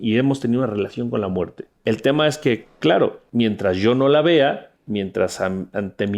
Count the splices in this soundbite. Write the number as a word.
three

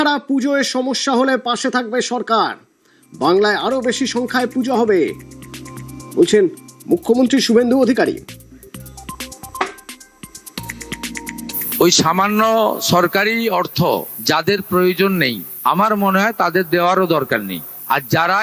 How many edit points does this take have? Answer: zero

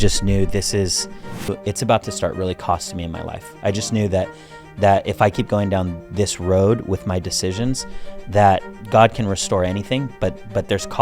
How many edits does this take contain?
one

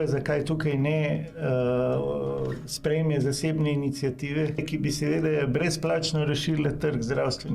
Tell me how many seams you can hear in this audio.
one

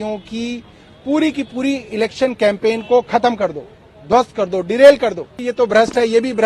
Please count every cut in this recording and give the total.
one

